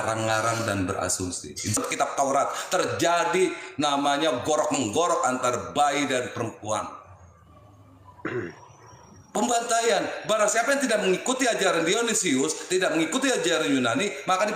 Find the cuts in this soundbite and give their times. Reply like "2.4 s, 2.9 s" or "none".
1.8 s